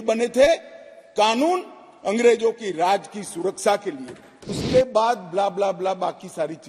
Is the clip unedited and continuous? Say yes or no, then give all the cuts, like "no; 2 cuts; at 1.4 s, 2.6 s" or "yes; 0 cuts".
no; 1 cut; at 4.5 s